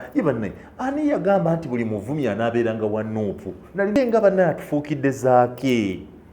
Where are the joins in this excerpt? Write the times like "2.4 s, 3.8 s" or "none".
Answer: 4.0 s